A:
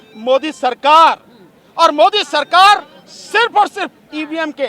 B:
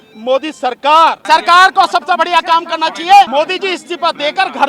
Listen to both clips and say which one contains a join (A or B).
B